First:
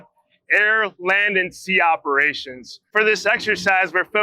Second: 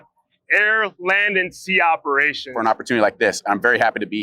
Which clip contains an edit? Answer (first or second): second